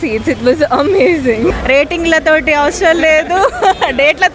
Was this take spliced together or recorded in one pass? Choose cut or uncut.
cut